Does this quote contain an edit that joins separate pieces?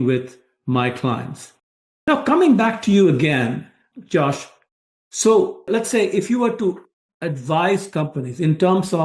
no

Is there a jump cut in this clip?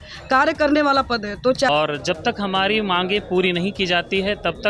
yes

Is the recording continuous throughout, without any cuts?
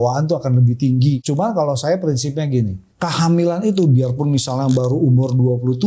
no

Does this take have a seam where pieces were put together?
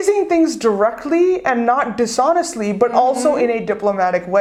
no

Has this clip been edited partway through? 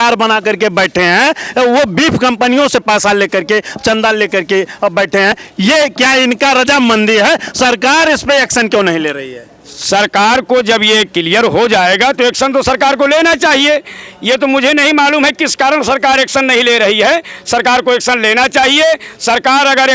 no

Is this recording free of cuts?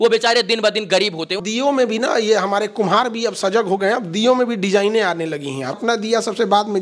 no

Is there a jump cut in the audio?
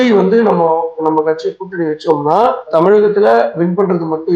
yes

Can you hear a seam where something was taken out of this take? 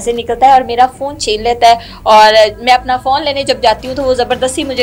no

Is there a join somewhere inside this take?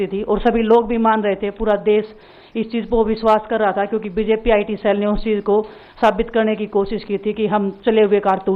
no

